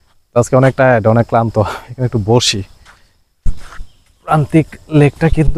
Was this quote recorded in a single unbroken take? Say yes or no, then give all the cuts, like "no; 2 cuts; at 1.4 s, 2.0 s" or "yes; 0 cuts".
yes; 0 cuts